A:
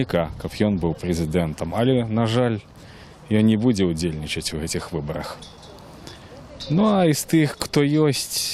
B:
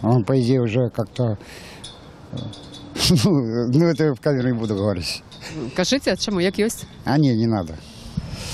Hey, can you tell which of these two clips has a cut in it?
A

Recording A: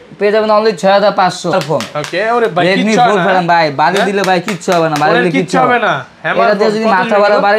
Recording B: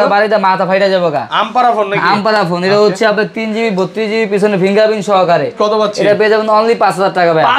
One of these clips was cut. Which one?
A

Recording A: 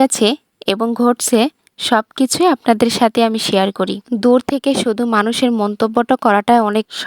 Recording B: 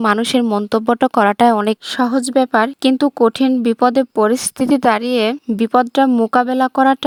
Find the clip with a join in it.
A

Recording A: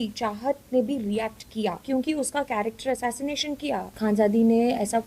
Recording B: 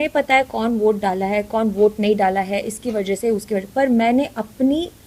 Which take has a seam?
A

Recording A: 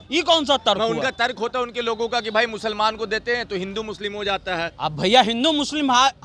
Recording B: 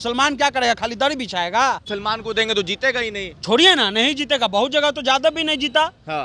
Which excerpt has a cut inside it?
B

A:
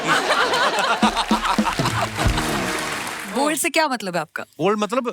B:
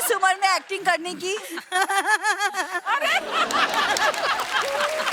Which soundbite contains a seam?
A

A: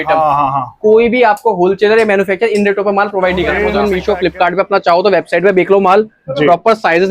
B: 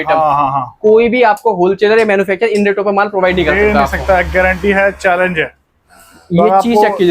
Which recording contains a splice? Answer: A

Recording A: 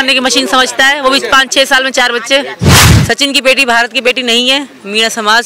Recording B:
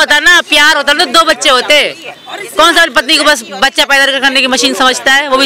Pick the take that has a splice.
A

